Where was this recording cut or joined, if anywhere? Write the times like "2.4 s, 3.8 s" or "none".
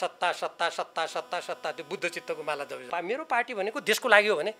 2.8 s

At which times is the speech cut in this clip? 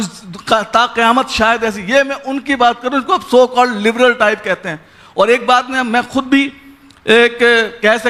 none

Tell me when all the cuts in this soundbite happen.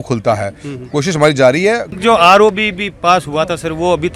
2.0 s

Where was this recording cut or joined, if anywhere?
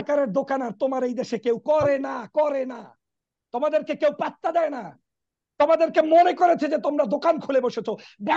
none

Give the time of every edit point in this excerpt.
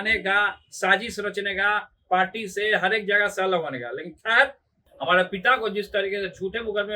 4.8 s

